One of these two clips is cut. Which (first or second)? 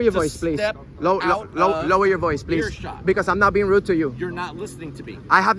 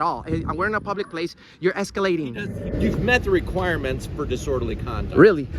second